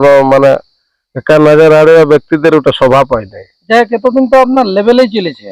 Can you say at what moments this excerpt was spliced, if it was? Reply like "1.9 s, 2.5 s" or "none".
none